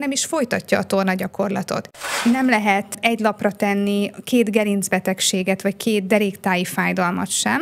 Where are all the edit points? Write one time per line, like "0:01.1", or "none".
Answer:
0:02.0

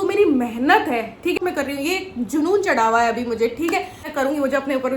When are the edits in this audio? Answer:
0:01.4
0:04.0

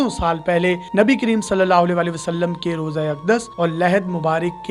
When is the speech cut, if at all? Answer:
none

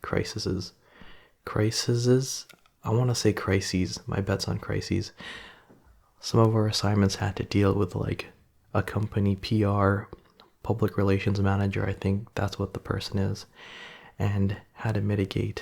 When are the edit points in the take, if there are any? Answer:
none

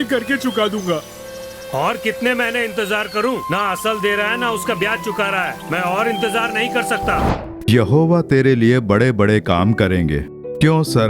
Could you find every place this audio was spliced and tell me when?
0:07.3

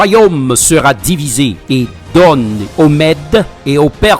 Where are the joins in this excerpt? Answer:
0:01.6

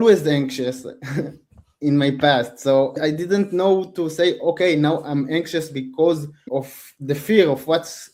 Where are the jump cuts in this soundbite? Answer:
0:03.0
0:06.4

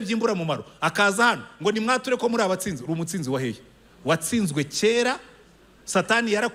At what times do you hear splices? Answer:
none

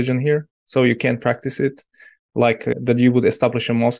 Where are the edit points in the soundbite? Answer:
0:02.7

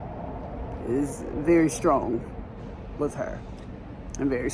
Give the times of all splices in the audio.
none

